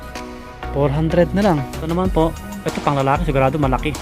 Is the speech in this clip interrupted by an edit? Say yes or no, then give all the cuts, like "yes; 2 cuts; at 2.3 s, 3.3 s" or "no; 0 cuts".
yes; 1 cut; at 1.9 s